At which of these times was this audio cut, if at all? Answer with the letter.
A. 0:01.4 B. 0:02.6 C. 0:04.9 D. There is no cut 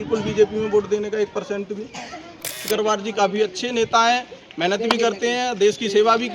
B